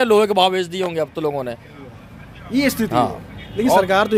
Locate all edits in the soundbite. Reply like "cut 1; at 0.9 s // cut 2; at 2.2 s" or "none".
none